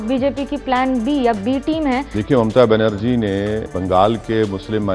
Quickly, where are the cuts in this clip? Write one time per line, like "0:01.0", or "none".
0:02.1
0:03.7